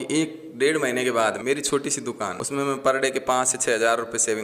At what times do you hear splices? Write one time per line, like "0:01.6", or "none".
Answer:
0:01.4
0:02.4